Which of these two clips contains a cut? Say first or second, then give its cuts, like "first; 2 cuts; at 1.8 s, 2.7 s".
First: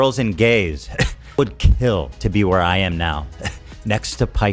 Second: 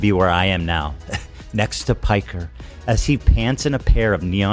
first; 1 cut; at 1.4 s